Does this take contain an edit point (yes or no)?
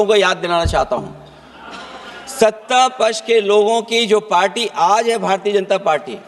no